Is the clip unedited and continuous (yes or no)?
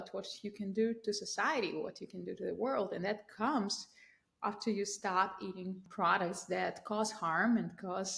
no